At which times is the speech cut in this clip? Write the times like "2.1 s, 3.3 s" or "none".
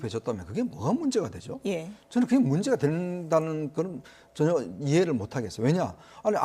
2.1 s